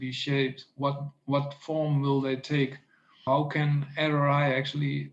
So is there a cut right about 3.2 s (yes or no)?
yes